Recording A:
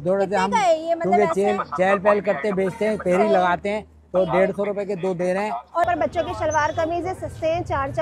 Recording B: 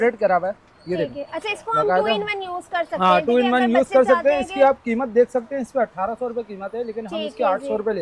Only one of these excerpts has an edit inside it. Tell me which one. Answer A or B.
A